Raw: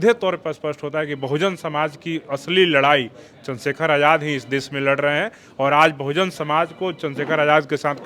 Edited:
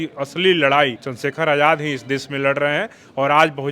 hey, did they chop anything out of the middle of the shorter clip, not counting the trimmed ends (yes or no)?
yes